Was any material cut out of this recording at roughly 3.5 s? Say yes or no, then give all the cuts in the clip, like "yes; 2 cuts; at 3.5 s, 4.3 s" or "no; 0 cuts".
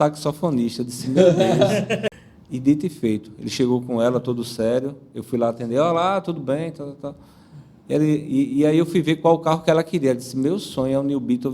no; 1 cut; at 2.1 s